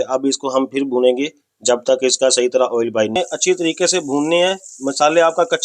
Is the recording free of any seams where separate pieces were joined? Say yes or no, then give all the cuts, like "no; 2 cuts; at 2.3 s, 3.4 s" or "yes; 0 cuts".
no; 1 cut; at 3.2 s